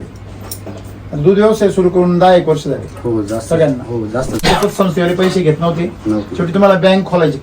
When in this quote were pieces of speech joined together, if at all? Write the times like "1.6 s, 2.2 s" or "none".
4.4 s